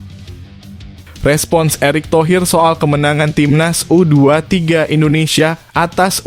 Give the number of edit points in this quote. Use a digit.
1